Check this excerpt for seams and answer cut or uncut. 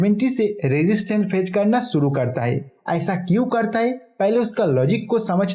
uncut